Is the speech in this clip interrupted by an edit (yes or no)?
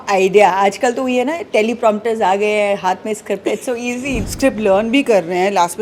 yes